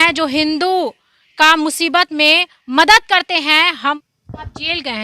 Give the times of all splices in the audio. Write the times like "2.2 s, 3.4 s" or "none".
4.0 s